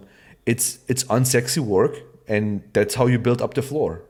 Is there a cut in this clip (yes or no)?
no